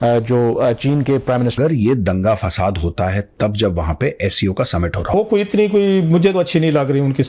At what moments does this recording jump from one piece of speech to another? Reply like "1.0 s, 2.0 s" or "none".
1.5 s, 5.1 s